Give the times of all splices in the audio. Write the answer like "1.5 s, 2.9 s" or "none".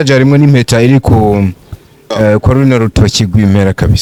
none